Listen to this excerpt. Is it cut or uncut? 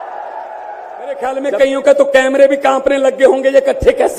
cut